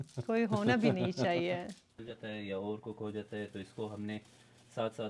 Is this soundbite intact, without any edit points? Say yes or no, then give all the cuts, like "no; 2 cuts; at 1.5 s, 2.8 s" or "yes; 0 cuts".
no; 1 cut; at 1.9 s